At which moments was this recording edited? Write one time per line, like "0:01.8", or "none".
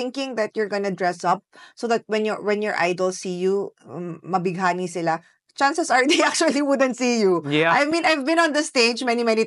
none